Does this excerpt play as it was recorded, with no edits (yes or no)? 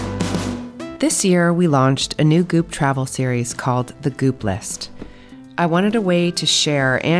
no